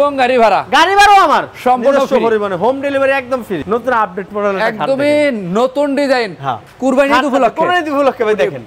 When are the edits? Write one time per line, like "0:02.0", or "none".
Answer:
0:03.6